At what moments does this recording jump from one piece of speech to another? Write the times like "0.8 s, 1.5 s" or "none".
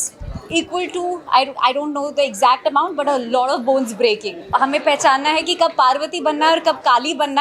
4.5 s